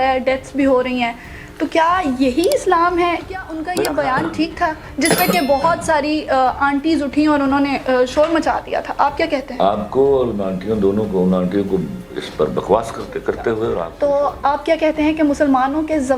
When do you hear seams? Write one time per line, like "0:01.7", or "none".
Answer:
0:03.6
0:13.8